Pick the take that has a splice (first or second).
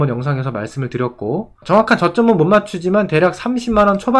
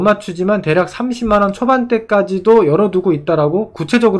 first